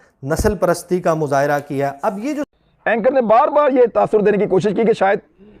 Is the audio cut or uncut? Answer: cut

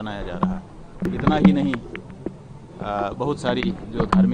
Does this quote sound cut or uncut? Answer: cut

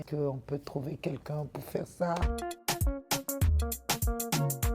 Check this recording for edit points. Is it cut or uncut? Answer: cut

